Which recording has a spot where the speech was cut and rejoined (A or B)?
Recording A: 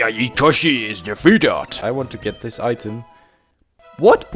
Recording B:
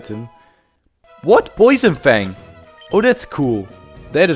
A